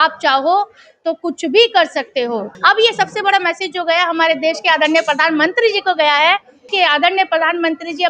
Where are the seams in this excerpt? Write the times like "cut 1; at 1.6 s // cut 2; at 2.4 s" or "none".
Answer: cut 1; at 2.5 s // cut 2; at 6.7 s